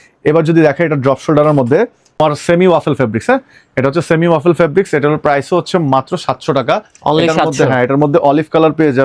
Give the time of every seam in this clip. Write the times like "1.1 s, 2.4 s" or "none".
2.1 s

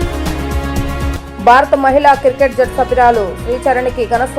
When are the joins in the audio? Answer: 1.0 s

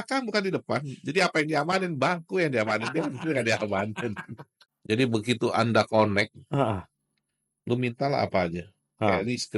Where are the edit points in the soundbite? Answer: 4.7 s

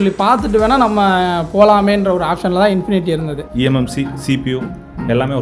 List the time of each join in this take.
3.4 s

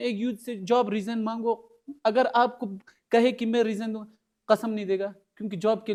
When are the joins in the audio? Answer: none

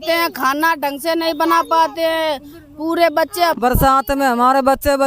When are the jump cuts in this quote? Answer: 3.6 s

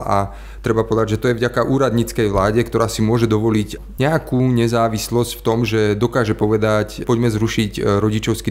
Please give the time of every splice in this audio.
3.8 s, 7.0 s

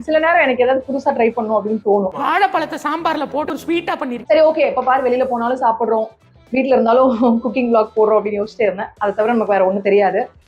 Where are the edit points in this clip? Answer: 4.2 s

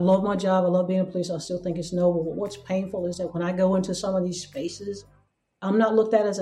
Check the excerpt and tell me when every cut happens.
5.1 s

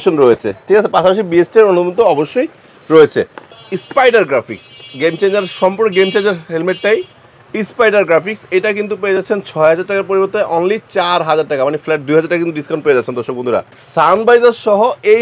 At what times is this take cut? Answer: 3.5 s, 13.8 s

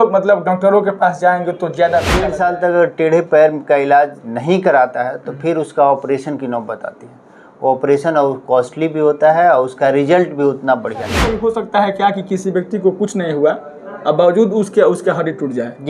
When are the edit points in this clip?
2.3 s, 11.2 s

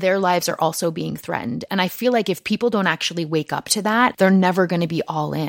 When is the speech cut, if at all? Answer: 4.1 s

